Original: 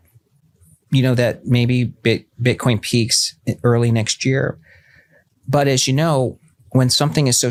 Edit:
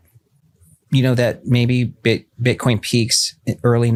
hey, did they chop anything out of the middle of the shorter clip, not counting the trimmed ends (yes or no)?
no